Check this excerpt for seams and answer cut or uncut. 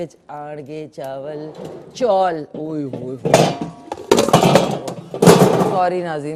uncut